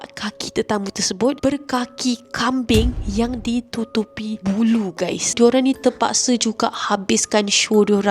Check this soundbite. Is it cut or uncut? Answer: cut